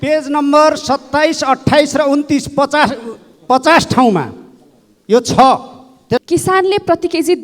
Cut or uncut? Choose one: cut